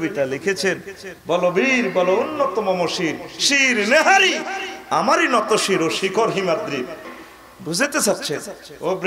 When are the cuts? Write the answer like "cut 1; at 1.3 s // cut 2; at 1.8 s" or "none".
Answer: cut 1; at 7.1 s